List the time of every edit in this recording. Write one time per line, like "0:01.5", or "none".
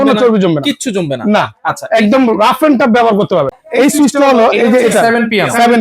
0:03.5